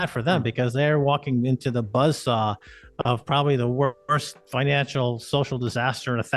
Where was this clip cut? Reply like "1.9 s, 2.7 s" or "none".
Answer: none